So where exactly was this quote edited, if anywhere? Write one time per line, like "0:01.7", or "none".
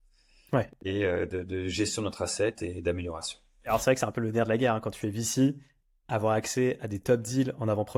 0:03.7